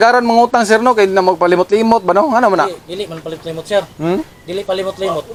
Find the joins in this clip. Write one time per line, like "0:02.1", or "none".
none